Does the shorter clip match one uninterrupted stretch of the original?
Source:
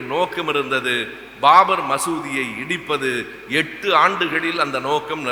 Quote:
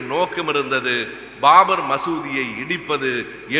yes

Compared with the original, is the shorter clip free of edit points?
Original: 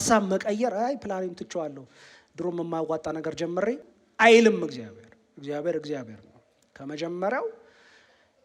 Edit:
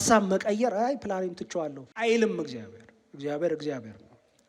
no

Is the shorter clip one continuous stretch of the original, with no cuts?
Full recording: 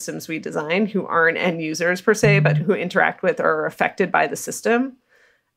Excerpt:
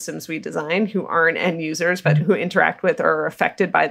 no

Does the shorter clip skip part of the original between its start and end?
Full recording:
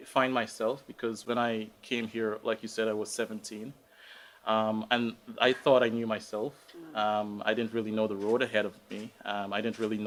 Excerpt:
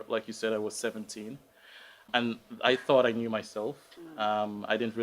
yes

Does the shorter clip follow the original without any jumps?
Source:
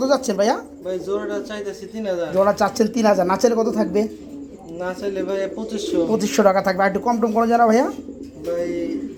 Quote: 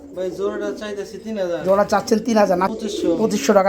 no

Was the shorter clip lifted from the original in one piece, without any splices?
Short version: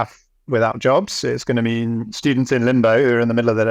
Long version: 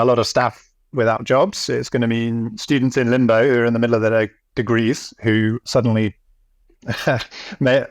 yes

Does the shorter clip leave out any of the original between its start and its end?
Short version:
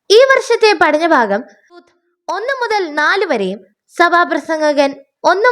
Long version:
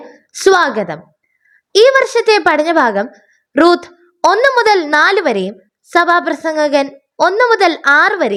yes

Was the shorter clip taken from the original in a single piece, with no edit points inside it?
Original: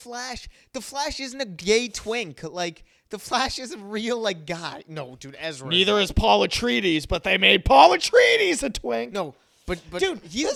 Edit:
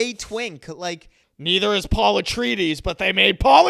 no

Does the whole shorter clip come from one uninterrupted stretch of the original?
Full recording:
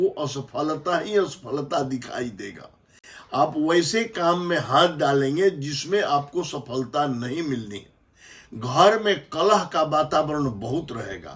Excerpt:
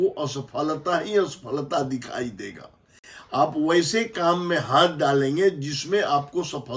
yes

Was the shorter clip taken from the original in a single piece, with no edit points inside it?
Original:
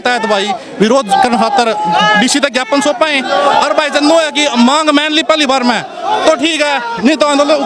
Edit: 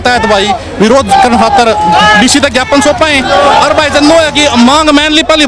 yes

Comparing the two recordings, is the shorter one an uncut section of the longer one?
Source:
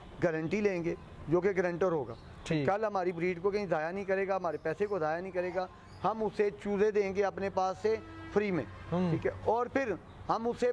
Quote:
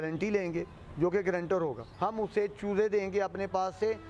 no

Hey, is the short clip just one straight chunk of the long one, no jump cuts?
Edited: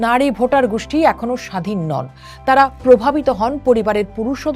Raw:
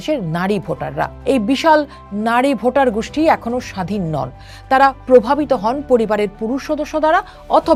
yes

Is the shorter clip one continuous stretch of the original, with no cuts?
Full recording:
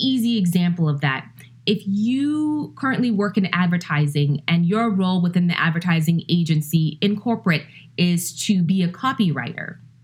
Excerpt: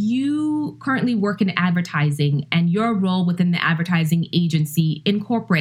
yes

